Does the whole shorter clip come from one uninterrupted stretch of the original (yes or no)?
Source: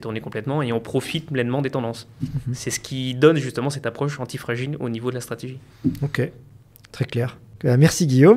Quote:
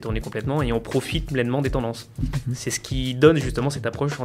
yes